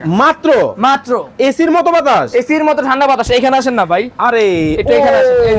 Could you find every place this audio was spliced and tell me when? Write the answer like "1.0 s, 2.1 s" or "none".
none